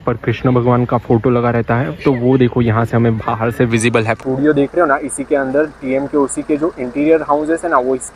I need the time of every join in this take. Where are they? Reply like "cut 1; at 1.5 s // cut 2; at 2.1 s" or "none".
cut 1; at 4.2 s

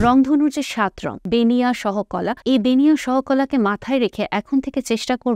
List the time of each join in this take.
cut 1; at 1.1 s // cut 2; at 2.3 s

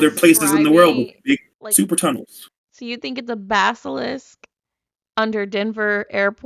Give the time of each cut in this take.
cut 1; at 1.6 s

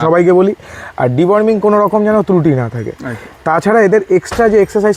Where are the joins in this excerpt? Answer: none

